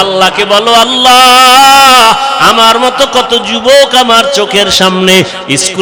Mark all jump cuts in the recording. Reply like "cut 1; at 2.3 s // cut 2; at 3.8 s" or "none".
none